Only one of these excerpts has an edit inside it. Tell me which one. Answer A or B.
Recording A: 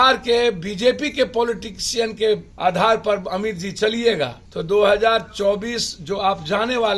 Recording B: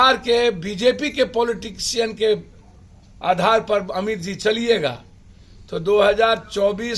A